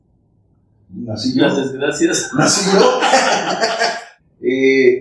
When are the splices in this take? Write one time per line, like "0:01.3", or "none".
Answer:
0:04.1